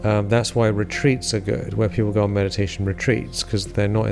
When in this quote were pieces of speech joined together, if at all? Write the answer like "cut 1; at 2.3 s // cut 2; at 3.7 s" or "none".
none